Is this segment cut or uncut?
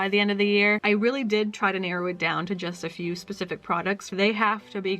cut